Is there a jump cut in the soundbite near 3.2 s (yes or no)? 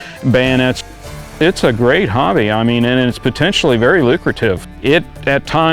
no